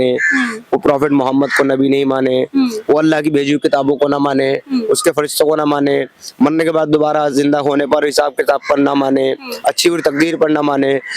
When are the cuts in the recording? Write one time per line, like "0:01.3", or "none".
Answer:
none

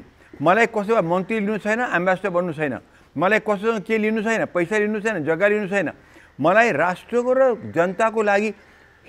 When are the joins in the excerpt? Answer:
none

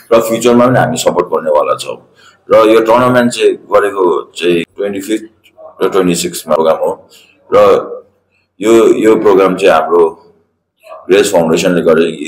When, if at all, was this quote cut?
0:04.7
0:06.6

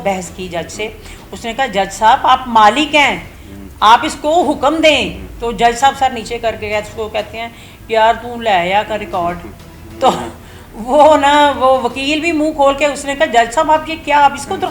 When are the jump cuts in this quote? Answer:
none

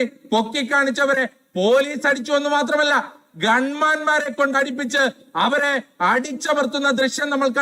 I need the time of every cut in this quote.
none

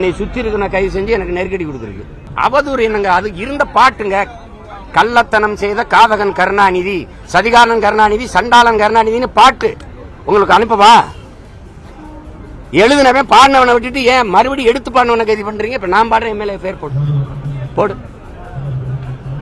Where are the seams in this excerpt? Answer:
0:02.2

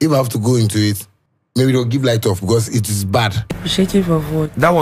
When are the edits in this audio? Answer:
0:03.4

